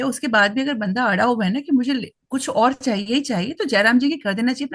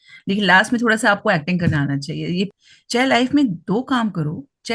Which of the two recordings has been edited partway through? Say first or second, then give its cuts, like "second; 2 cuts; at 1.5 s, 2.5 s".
second; 1 cut; at 2.5 s